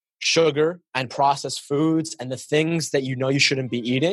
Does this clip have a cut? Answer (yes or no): no